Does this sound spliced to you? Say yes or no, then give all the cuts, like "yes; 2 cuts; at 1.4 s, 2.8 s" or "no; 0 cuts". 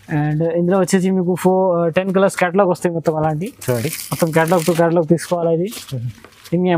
no; 0 cuts